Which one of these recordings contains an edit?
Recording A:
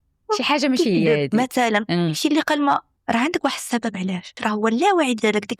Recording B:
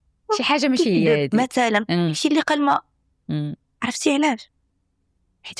A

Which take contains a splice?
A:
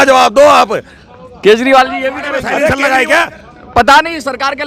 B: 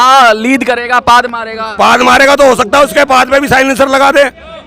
A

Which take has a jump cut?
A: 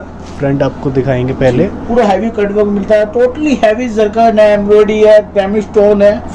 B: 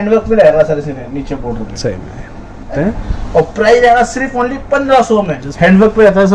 B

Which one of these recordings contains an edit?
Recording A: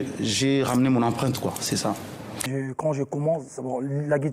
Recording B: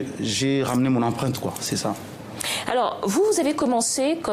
A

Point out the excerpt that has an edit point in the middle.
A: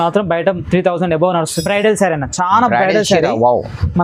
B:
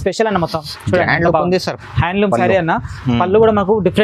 A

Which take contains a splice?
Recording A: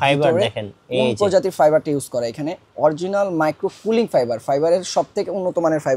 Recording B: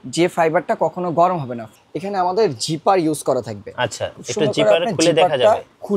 B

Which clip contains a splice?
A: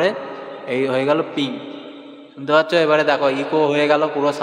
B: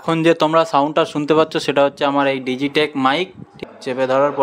B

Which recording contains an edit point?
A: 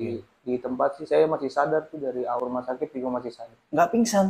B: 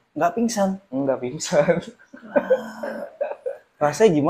A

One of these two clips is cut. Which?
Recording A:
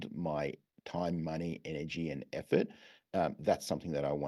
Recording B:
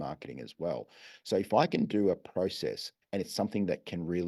B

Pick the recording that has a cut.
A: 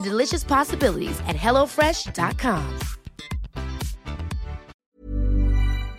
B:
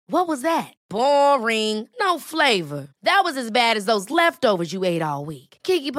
A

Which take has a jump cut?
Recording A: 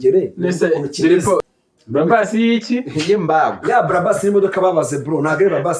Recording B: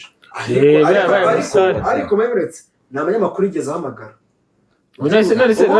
A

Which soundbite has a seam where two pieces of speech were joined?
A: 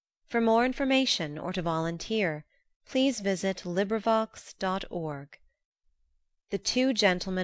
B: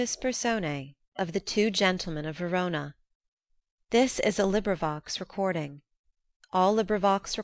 B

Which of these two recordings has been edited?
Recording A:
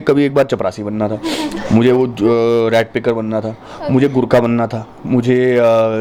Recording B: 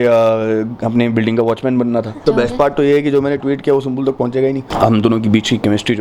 B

